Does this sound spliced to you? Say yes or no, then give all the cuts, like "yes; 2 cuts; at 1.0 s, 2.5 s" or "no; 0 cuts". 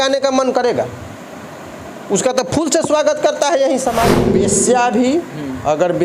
yes; 1 cut; at 4.2 s